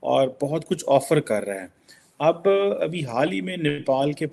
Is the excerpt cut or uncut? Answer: uncut